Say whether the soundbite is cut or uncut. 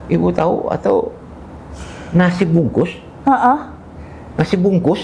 uncut